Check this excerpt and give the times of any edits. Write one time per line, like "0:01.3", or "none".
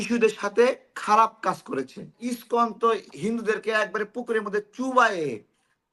0:02.3